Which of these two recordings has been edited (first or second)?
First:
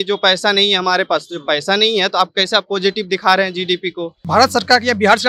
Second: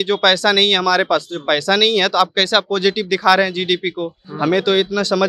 first